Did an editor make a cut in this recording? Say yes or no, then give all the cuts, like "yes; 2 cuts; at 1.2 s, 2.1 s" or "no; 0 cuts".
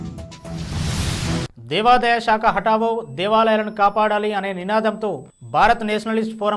yes; 1 cut; at 1.5 s